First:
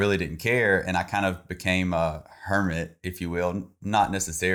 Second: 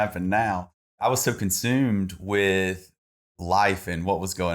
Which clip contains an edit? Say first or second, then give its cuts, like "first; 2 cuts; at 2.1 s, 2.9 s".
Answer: second; 1 cut; at 1.0 s